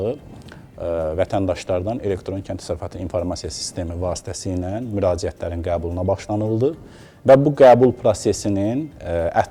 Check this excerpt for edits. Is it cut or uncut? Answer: uncut